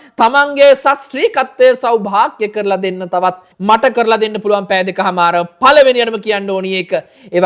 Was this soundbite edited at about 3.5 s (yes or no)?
yes